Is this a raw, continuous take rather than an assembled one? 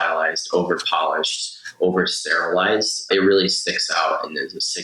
no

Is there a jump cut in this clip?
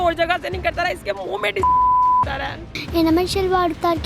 yes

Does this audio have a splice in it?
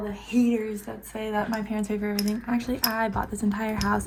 no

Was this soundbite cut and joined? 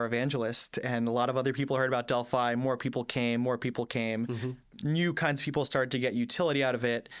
no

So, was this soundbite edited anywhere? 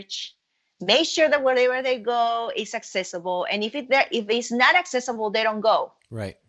no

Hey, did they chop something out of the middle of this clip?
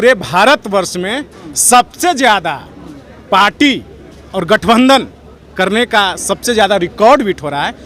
no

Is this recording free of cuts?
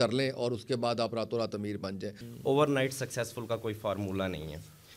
no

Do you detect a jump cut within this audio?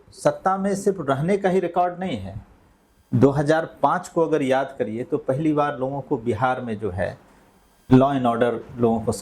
no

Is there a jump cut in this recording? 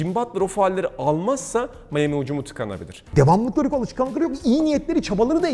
yes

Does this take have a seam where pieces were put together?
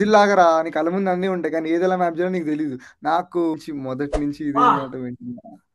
yes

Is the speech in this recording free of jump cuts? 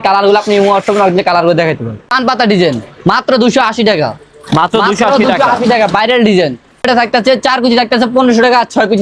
no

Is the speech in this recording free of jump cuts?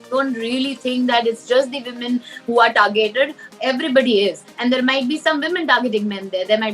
yes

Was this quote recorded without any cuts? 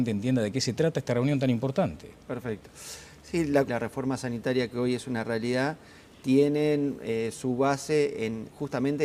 yes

